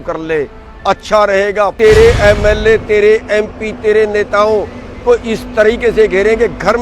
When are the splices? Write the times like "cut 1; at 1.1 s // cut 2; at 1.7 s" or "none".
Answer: cut 1; at 1.7 s